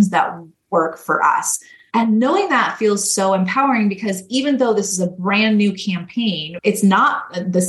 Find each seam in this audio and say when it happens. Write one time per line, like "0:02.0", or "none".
0:01.8
0:06.5